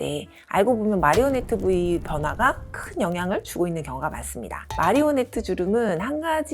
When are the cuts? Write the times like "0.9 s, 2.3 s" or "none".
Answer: 4.6 s

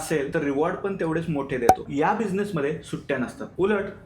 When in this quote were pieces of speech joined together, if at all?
1.8 s

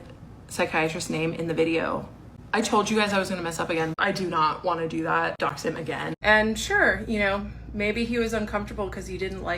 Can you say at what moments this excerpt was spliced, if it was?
4.0 s, 6.2 s

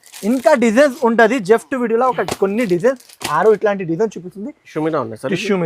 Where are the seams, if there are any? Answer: 4.6 s

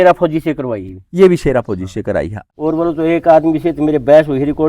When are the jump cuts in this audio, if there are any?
2.4 s

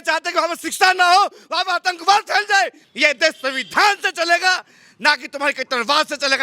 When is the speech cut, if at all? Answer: 2.8 s

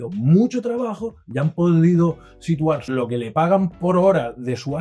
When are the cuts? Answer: 2.9 s

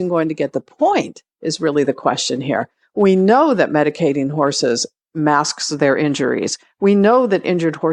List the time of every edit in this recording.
none

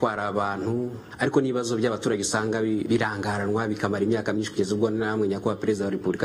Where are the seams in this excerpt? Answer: 1.0 s, 2.8 s

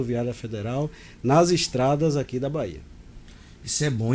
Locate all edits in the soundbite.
none

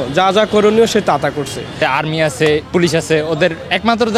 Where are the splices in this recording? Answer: 1.8 s

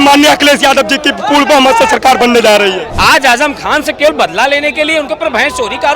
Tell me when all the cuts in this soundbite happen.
2.9 s

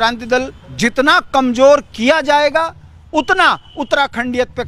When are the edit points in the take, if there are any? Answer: none

